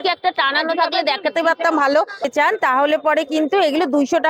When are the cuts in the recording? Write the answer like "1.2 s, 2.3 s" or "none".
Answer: 2.3 s